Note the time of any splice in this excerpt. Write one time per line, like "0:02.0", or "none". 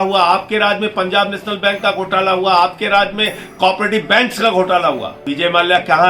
0:05.1